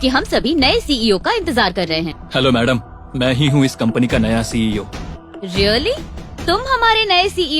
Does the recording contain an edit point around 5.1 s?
yes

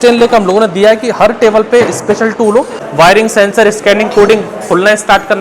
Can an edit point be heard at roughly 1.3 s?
no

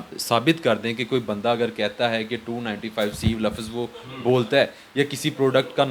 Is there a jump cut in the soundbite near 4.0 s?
no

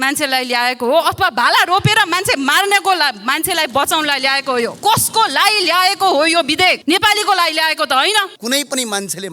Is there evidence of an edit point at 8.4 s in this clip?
yes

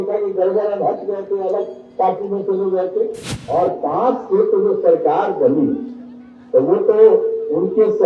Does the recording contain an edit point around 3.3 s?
yes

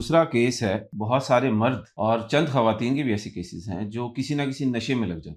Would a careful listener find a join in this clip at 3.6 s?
no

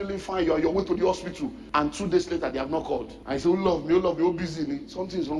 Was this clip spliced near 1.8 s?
yes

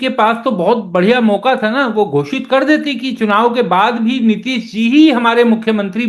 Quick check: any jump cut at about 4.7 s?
no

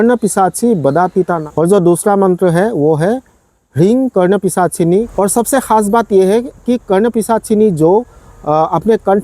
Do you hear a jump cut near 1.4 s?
yes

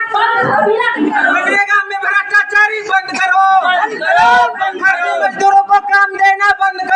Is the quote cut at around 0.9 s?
yes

